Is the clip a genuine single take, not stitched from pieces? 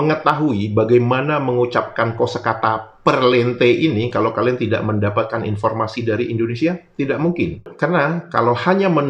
yes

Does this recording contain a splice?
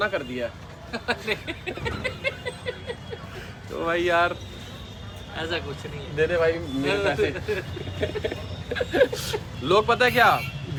no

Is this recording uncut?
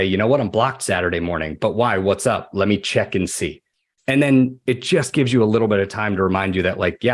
yes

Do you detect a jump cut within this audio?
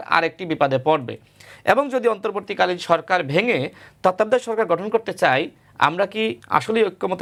no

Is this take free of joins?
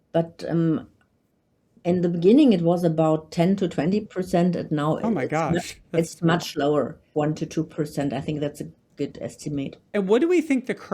no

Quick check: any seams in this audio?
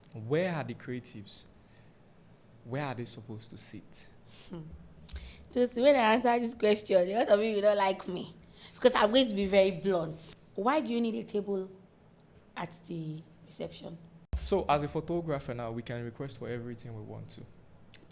yes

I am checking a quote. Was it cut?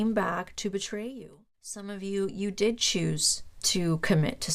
yes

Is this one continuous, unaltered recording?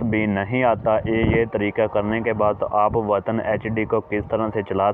yes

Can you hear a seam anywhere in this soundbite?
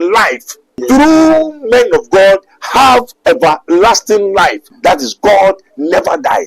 yes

